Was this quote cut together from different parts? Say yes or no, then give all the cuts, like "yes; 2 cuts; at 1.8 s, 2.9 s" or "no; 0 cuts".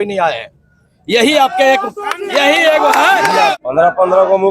yes; 1 cut; at 3.5 s